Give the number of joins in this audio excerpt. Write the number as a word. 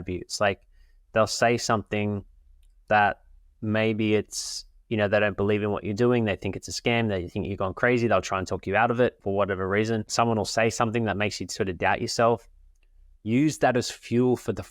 two